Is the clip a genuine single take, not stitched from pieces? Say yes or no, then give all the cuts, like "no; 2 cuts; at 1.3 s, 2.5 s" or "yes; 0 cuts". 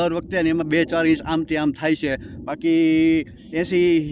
yes; 0 cuts